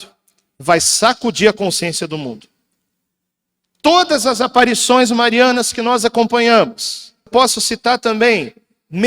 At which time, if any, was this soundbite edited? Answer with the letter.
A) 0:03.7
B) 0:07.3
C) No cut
B